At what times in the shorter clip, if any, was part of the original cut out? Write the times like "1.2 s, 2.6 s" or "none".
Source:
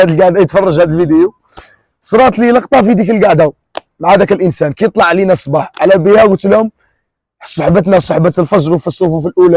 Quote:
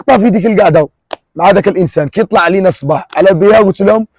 none